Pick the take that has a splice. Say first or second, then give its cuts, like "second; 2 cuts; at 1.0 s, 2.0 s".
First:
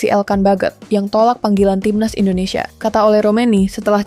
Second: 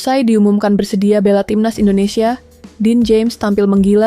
first; 1 cut; at 2.7 s